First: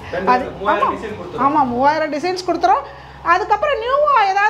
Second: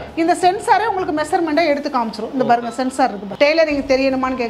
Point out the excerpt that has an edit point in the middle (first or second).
second